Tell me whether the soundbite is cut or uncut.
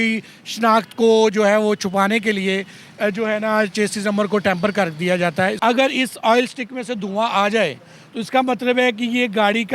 cut